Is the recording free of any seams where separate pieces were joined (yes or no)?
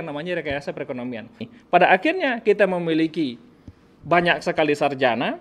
no